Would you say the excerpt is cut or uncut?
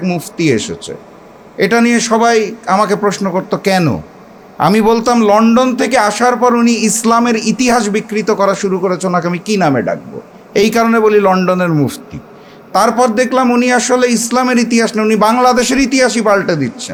uncut